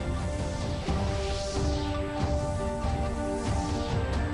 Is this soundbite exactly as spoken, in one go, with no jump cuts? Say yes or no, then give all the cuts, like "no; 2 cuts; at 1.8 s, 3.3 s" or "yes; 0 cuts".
yes; 0 cuts